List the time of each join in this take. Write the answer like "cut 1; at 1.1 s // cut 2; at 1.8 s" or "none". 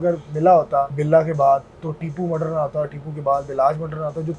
cut 1; at 1.0 s